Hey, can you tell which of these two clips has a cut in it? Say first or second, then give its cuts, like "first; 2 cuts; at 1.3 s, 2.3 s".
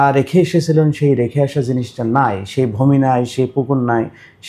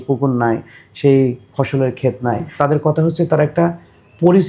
second; 1 cut; at 2.5 s